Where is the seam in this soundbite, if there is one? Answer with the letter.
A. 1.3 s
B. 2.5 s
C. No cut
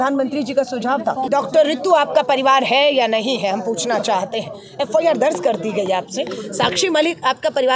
A